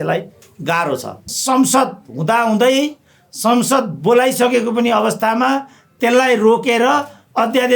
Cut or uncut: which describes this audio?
cut